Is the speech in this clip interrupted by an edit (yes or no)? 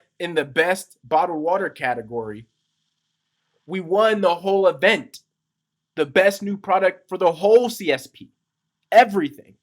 no